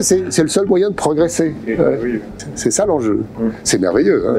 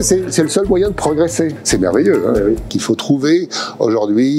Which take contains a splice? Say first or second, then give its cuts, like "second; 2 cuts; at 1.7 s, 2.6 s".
second; 2 cuts; at 1.6 s, 2.7 s